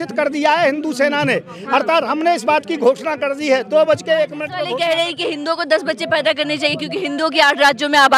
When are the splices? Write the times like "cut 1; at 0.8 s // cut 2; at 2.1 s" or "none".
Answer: cut 1; at 4.5 s